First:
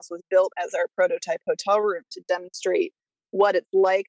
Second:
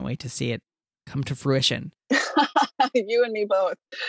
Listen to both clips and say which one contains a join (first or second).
second